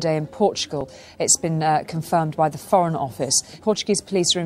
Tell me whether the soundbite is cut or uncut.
cut